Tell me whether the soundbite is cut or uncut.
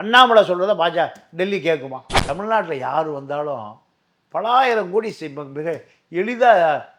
cut